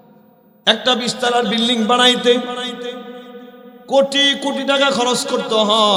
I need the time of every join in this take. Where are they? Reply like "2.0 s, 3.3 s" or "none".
none